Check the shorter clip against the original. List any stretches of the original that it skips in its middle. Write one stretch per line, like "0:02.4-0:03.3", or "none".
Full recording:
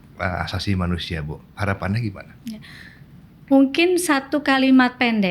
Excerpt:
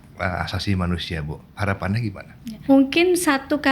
0:02.6-0:03.4